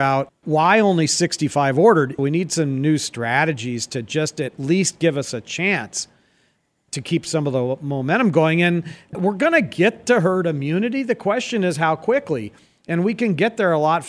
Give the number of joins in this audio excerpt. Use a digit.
2